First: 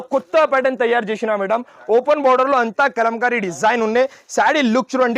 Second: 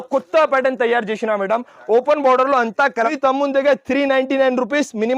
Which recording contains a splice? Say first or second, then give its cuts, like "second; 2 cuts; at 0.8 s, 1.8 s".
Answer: second; 1 cut; at 3.1 s